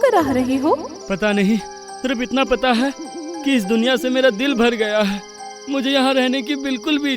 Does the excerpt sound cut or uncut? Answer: cut